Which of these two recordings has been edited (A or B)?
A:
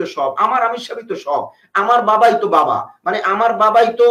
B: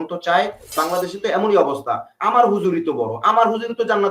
B